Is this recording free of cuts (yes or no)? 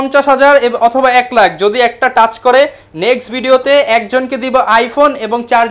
yes